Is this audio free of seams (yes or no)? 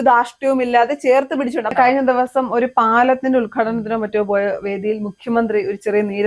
no